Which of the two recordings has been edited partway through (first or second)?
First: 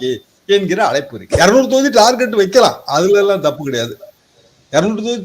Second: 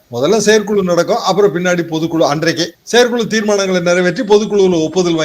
first